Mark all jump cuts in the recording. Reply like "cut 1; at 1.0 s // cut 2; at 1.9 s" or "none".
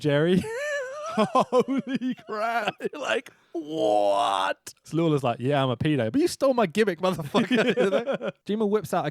cut 1; at 4.9 s